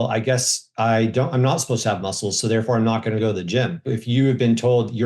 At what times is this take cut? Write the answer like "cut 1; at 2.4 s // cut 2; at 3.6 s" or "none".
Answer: cut 1; at 3.9 s